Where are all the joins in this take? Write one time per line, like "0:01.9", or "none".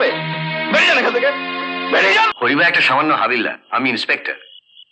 0:02.3